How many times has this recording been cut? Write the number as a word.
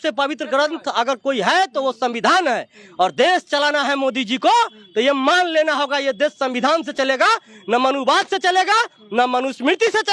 zero